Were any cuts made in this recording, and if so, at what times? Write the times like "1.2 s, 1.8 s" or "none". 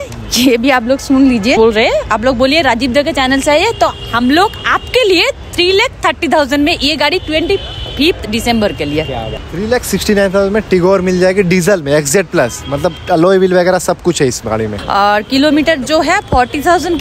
1.6 s, 9.3 s, 14.8 s